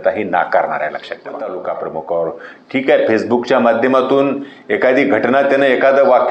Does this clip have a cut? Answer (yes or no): yes